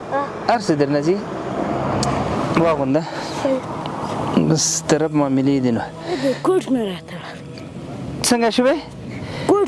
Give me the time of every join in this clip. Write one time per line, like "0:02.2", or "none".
0:02.5
0:06.1